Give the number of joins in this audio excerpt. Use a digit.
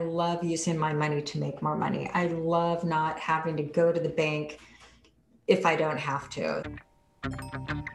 1